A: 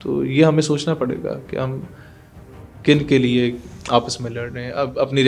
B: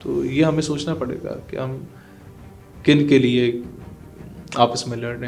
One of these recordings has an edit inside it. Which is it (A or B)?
A